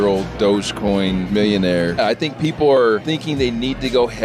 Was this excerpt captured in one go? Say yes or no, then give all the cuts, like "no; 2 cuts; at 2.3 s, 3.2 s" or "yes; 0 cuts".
no; 3 cuts; at 1.3 s, 2.0 s, 3.0 s